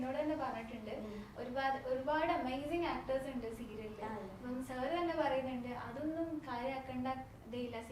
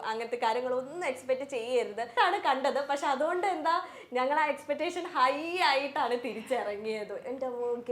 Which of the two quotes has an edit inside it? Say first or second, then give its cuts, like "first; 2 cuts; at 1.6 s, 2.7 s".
second; 1 cut; at 2.1 s